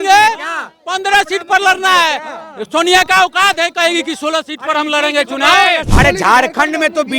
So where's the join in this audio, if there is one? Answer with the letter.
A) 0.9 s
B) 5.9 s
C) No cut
B